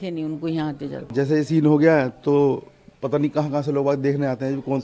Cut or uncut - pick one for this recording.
cut